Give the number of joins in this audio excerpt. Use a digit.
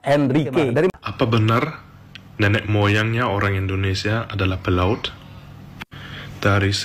1